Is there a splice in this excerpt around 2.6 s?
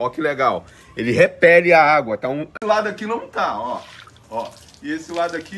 yes; 1 cut; at 2.6 s

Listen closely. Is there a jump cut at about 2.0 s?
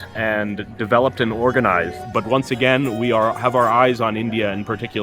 yes; 1 cut; at 2.0 s

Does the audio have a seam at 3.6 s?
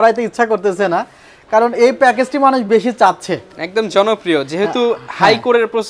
no; 0 cuts

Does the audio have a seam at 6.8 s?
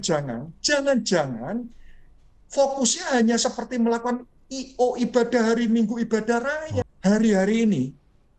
yes; 1 cut; at 6.8 s

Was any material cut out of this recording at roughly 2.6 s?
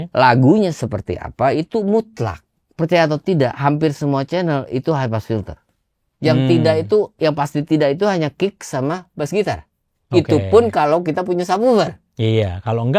yes; 1 cut; at 2.6 s

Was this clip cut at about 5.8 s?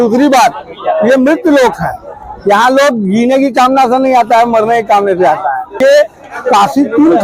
yes; 1 cut; at 5.8 s

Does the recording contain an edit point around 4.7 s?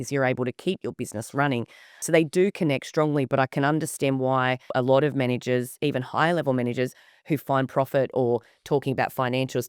yes; 2 cuts; at 2.0 s, 4.7 s

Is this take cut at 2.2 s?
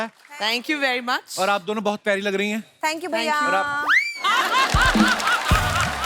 no; 0 cuts

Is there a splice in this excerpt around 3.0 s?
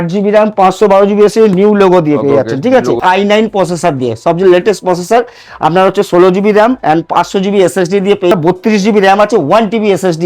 yes; 2 cuts; at 3.0 s, 8.3 s

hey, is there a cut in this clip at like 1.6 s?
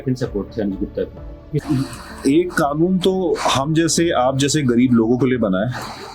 yes; 1 cut; at 1.6 s

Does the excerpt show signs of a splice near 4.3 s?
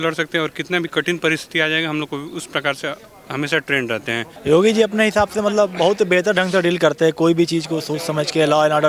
yes; 1 cut; at 4.3 s

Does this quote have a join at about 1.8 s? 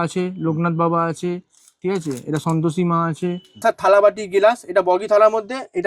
no; 1 cut; at 3.6 s

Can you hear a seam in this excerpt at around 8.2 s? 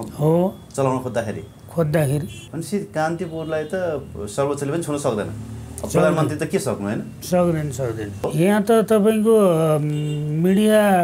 yes; 2 cuts; at 2.4 s, 8.2 s

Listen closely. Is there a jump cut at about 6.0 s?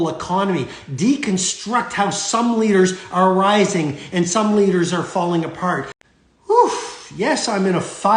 yes; 1 cut; at 6.0 s

